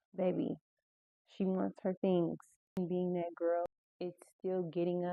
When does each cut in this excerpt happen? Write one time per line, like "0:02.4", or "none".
0:02.8
0:03.7